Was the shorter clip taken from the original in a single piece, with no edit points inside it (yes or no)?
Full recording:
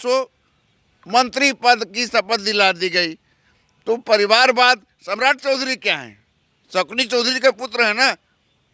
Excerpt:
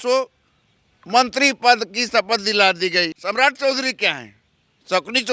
no